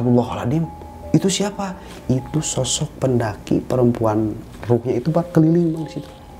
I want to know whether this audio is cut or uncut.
uncut